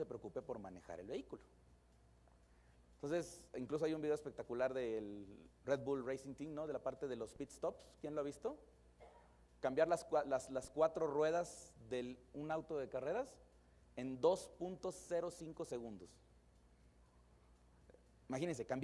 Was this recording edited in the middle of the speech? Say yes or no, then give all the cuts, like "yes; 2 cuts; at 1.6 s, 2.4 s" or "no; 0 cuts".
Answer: no; 0 cuts